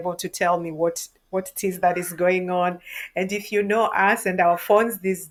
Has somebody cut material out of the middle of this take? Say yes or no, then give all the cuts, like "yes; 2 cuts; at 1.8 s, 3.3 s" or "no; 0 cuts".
no; 0 cuts